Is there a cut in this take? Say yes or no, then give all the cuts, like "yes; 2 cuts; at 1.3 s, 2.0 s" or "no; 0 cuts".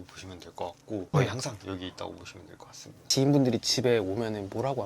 yes; 2 cuts; at 1.1 s, 3.1 s